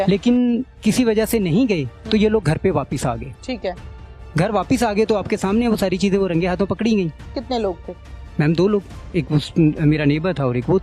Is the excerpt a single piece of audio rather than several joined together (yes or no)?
no